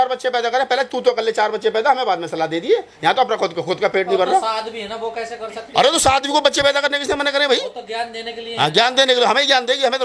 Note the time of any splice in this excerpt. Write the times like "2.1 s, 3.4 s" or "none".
none